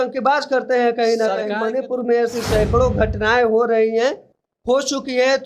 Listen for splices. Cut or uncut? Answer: cut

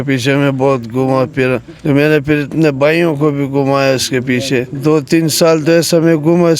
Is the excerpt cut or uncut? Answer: cut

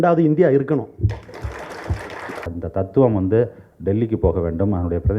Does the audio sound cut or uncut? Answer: cut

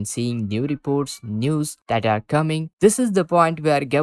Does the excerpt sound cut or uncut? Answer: cut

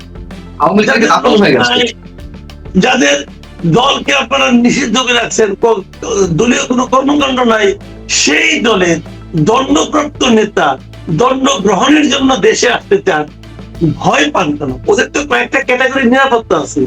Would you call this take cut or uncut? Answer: cut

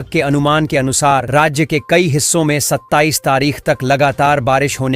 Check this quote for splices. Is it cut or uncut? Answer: uncut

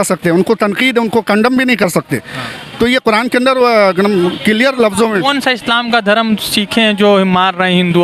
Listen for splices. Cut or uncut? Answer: uncut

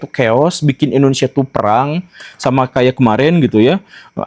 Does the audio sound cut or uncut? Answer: uncut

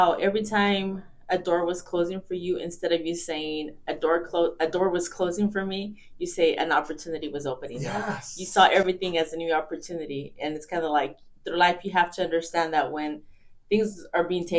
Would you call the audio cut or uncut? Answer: uncut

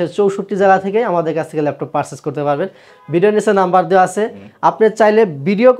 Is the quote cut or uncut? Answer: uncut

